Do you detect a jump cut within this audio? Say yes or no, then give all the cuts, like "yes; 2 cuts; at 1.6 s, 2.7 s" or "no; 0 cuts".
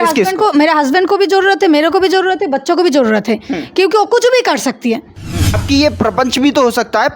yes; 1 cut; at 5.4 s